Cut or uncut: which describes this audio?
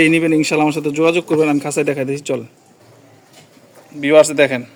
uncut